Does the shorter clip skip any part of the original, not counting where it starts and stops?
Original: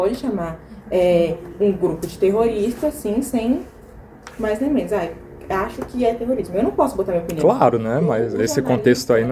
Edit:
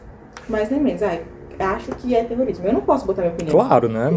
no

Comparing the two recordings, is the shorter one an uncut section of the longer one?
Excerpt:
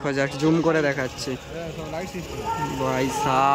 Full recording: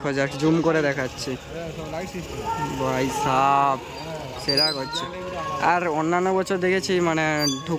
yes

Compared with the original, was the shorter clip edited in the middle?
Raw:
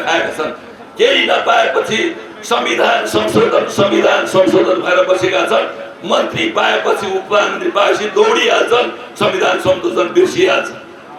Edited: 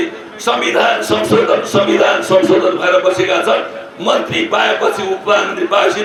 no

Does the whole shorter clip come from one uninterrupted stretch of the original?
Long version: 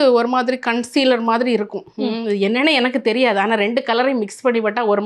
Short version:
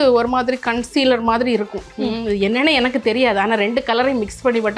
yes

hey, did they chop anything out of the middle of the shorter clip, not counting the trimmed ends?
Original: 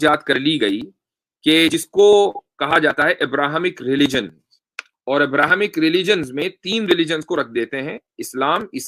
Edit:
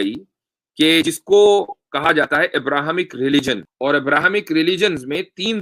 yes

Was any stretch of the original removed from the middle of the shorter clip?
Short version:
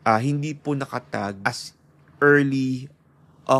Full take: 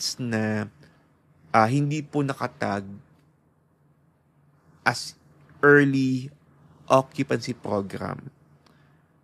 yes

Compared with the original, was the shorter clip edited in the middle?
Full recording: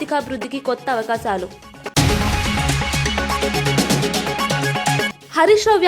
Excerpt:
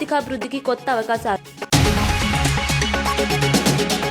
yes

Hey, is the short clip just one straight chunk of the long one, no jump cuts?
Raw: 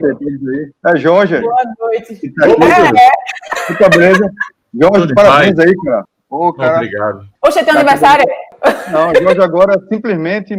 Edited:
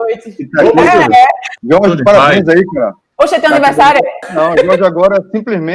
no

